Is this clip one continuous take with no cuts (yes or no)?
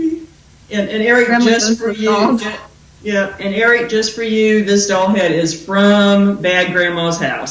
no